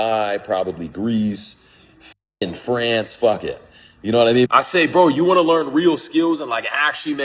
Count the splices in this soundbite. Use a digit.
1